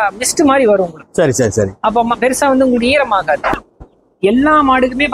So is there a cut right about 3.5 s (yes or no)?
yes